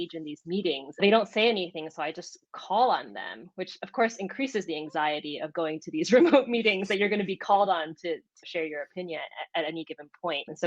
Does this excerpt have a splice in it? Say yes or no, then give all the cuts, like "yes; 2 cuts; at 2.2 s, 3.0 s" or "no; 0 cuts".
yes; 1 cut; at 1.0 s